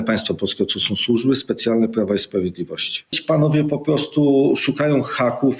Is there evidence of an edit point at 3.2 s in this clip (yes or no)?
yes